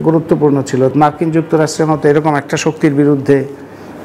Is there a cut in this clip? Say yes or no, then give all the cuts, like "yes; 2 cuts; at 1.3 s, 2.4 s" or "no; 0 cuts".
yes; 1 cut; at 0.9 s